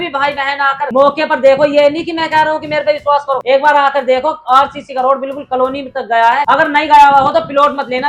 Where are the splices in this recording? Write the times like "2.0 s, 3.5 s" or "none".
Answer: none